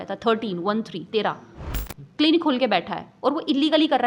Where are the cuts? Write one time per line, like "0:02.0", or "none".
0:01.5